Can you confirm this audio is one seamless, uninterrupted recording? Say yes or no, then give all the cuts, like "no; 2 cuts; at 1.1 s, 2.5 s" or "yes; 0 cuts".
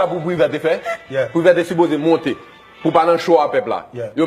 no; 1 cut; at 2.9 s